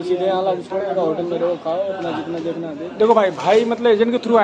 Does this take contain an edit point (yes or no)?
no